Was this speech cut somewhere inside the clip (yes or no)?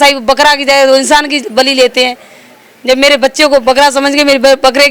no